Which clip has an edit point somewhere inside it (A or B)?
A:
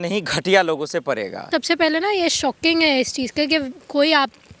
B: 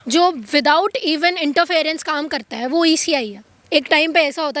A